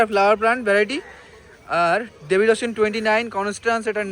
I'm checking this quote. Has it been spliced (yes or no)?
no